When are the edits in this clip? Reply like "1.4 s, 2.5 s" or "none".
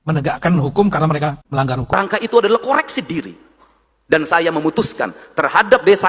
1.9 s